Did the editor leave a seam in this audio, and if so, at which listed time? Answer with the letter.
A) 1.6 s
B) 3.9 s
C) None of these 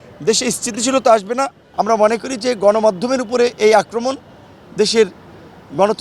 A